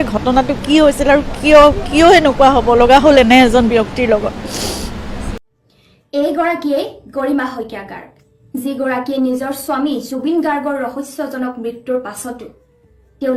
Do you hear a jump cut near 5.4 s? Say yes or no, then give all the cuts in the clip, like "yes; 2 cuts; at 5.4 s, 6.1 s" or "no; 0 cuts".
yes; 1 cut; at 5.4 s